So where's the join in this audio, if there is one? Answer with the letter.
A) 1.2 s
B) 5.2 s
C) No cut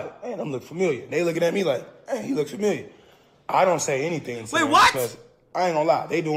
C